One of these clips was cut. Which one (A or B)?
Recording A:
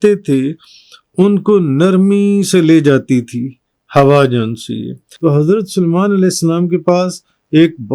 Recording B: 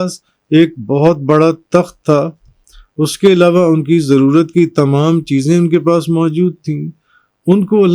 A